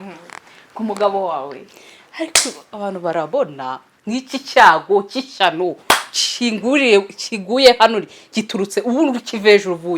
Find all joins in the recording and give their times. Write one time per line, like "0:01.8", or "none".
none

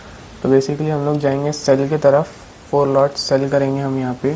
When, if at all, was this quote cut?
none

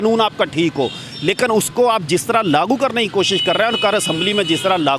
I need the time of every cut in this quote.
none

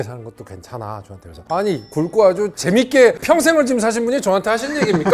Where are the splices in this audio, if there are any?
none

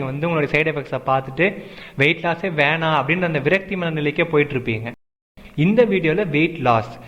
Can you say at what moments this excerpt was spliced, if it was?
0:05.3

